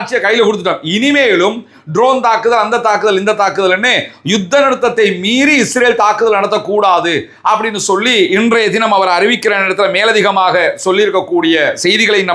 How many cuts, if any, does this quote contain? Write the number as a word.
zero